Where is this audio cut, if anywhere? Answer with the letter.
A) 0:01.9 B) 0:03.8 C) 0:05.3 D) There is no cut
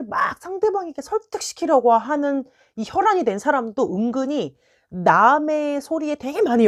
D